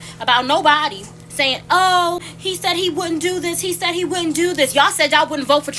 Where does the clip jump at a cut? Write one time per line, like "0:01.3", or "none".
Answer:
0:02.3
0:04.7